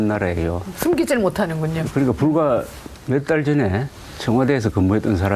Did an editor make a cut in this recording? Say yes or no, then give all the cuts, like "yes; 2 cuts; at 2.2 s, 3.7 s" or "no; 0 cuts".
no; 0 cuts